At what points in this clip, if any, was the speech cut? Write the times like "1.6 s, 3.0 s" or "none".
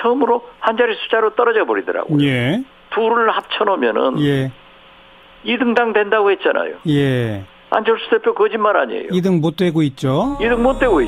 none